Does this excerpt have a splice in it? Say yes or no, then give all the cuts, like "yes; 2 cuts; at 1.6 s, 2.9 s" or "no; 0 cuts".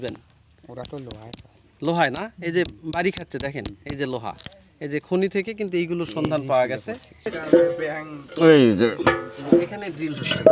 yes; 1 cut; at 7.3 s